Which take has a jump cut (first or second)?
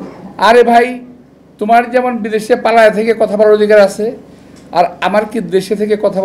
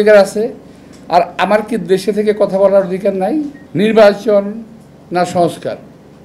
second